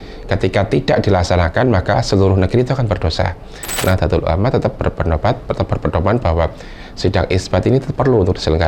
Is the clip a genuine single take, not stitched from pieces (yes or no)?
no